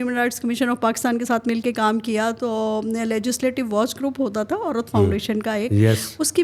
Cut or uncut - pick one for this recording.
uncut